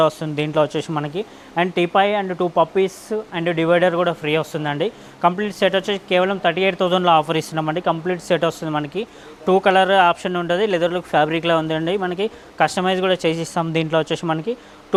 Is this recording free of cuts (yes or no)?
yes